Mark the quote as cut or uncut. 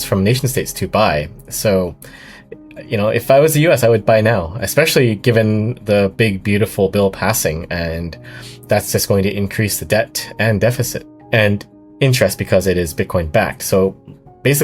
cut